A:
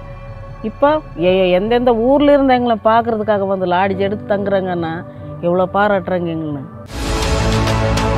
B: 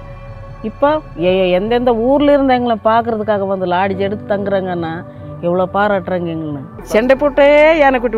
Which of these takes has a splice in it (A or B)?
B